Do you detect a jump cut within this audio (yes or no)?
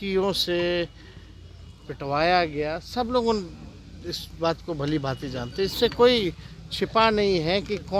no